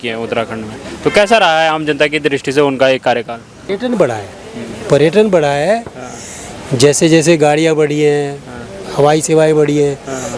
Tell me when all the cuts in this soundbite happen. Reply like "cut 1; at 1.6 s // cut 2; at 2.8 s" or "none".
none